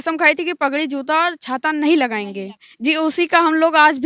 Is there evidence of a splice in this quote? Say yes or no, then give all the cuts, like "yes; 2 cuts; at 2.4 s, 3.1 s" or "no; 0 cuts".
no; 0 cuts